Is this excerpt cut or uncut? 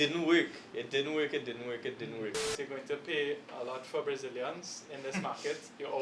cut